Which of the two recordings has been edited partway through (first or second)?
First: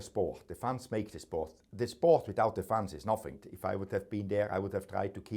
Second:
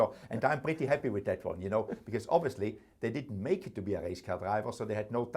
first